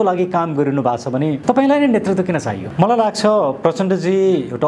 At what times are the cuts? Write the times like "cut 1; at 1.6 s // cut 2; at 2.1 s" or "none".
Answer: cut 1; at 1.4 s // cut 2; at 2.6 s